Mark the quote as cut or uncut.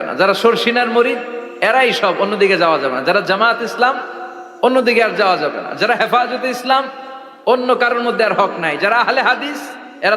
uncut